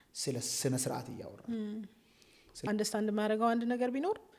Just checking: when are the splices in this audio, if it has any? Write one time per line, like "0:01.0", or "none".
0:02.6